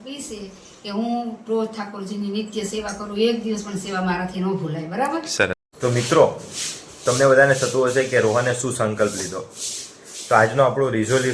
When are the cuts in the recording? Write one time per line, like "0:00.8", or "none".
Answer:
0:05.6